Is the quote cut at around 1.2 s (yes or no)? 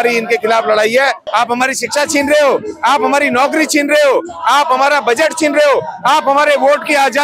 yes